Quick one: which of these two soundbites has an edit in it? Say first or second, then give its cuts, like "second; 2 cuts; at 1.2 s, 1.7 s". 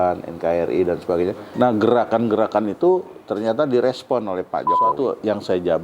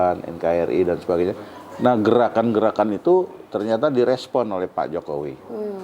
first; 2 cuts; at 1.4 s, 4.9 s